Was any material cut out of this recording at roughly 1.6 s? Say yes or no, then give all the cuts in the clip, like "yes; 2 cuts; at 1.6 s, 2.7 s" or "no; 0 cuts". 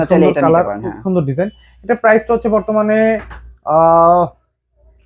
no; 0 cuts